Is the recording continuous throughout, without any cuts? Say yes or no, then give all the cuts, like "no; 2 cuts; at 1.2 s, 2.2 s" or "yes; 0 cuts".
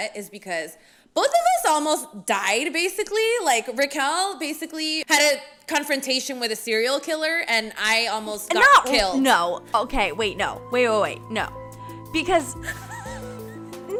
yes; 0 cuts